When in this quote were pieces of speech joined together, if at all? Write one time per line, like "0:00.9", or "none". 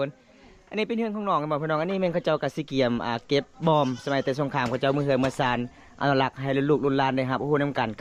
none